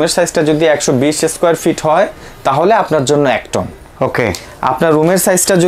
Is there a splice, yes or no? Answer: no